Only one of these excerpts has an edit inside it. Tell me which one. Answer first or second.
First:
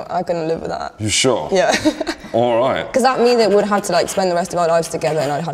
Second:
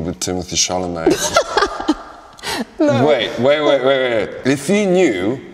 second